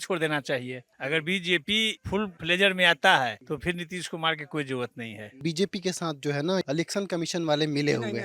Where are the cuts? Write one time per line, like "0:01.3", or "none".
0:00.9
0:05.4